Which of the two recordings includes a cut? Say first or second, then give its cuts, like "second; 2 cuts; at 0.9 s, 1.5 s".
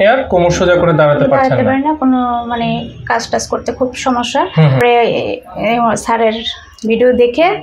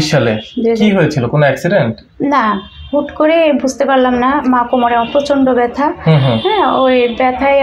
first; 1 cut; at 4.8 s